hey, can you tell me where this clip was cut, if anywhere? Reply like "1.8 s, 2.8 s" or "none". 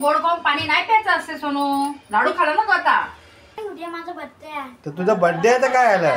3.6 s